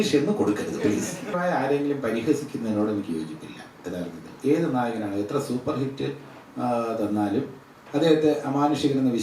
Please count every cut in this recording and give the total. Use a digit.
1